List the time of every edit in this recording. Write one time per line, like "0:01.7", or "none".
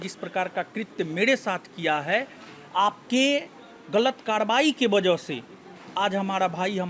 none